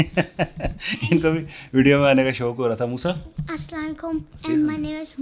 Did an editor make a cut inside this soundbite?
yes; 2 cuts; at 3.3 s, 4.3 s

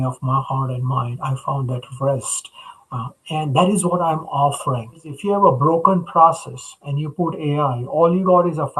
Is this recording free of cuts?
no; 1 cut; at 5.1 s

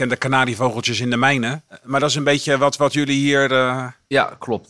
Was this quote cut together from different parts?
yes; 1 cut; at 1.7 s

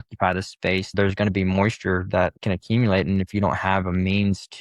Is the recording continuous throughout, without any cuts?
no; 1 cut; at 0.9 s

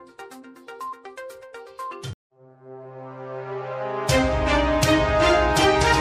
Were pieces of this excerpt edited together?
no; 0 cuts

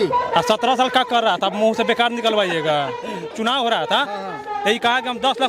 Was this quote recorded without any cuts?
no; 1 cut; at 3.3 s

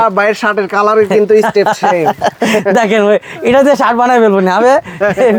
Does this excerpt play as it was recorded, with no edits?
yes; 0 cuts

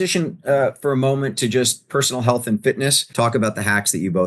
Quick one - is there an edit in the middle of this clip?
yes; 1 cut; at 3.0 s

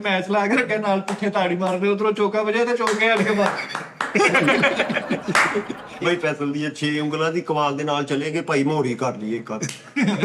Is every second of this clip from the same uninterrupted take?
yes; 0 cuts

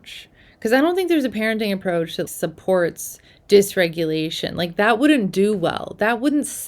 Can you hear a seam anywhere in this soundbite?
yes; 1 cut; at 2.3 s

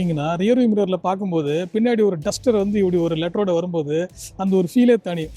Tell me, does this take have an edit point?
no; 0 cuts

